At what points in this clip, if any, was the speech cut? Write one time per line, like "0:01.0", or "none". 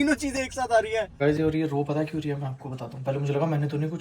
0:01.1